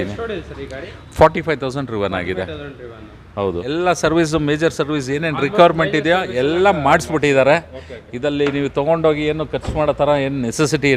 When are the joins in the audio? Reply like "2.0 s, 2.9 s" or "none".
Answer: 3.6 s